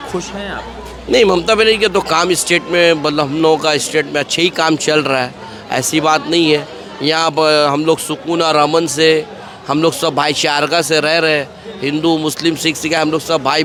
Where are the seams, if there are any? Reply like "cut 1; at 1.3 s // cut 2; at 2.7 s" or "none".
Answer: none